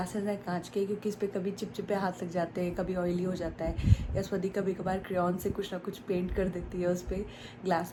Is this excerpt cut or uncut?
uncut